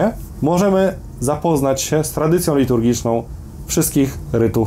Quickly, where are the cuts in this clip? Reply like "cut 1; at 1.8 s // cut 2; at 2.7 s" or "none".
none

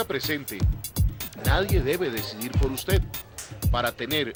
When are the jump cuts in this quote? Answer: none

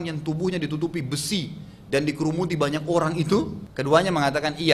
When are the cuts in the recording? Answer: cut 1; at 3.6 s

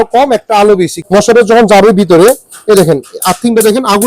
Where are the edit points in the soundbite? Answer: cut 1; at 1.0 s

